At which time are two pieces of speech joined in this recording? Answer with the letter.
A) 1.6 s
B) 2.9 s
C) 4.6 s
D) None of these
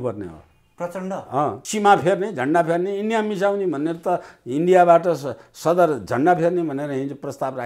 A